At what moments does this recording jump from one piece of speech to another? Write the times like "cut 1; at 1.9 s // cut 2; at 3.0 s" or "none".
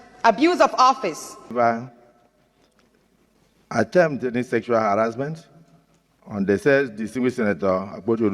cut 1; at 1.5 s